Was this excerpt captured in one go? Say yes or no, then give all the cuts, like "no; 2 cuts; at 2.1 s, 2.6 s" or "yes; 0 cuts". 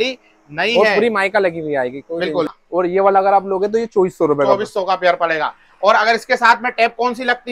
no; 1 cut; at 2.6 s